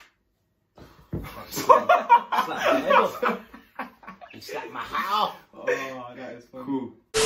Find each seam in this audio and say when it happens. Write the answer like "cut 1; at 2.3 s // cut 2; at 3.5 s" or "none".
none